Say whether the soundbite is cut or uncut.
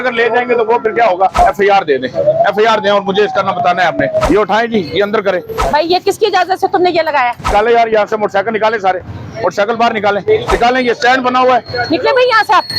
cut